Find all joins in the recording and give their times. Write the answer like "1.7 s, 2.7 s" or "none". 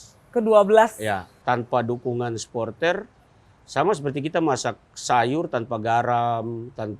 1.3 s